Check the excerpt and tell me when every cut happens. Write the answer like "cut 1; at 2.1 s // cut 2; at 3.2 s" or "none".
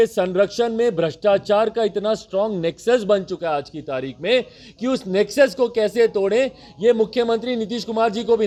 none